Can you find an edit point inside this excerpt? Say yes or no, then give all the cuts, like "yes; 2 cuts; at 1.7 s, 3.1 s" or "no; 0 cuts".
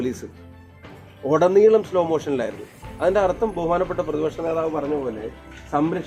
no; 0 cuts